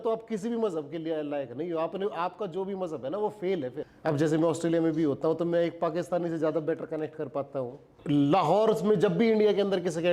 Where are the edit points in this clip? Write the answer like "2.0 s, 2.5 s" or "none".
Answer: 3.8 s, 7.9 s